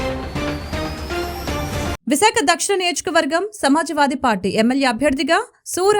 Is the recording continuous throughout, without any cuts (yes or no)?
no